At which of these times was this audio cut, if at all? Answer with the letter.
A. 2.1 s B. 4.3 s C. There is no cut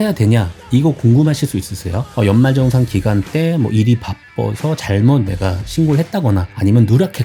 A